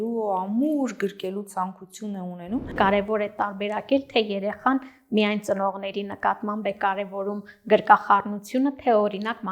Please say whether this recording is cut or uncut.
cut